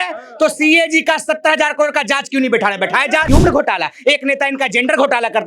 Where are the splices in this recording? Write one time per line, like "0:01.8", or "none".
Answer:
0:03.2